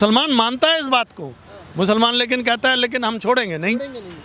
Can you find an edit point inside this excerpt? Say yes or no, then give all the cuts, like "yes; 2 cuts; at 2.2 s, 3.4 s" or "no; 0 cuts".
no; 0 cuts